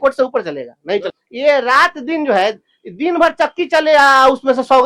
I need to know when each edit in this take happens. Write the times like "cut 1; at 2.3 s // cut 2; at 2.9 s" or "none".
cut 1; at 1.1 s